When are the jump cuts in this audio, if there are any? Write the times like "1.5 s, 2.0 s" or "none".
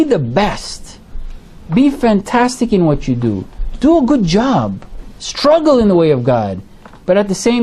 none